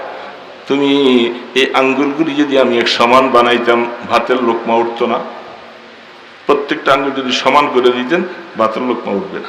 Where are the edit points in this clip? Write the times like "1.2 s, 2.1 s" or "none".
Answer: none